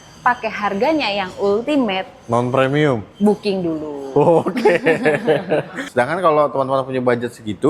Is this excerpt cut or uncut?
cut